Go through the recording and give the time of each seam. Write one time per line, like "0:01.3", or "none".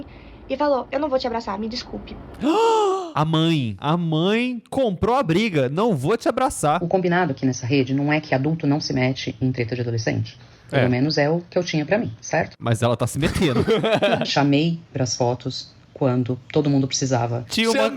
0:03.7
0:06.8
0:14.2